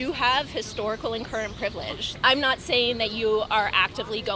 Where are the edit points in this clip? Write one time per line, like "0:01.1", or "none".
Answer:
0:02.1